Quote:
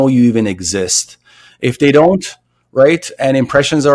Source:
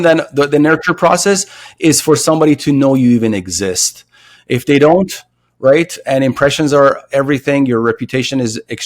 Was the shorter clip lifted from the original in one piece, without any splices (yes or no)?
yes